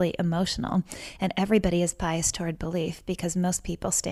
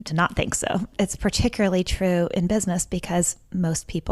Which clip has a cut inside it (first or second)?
second